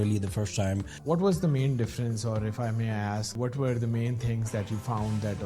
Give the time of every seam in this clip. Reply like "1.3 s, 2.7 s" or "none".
0.9 s, 3.3 s

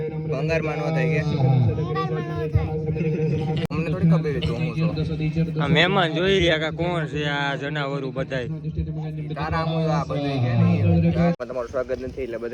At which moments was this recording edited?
3.7 s, 11.4 s

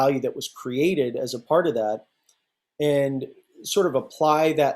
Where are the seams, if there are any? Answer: none

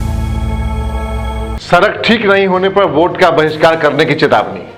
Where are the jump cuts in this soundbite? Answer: 1.5 s

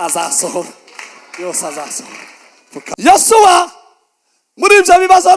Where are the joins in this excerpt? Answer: 2.9 s

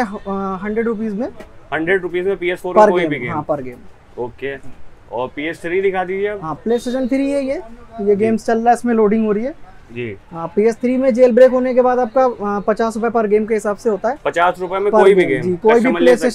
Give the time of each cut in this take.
none

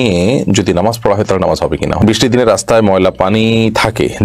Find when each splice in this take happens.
2.0 s

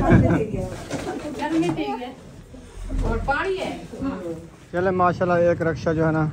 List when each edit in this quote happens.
4.6 s

